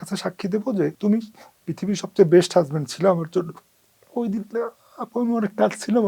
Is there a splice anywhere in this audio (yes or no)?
yes